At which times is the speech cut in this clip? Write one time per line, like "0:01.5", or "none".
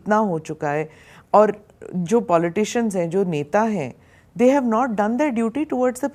none